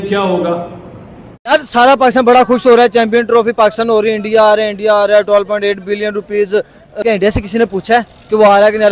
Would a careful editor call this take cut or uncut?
cut